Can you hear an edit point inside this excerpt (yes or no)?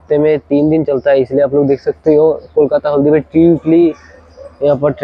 no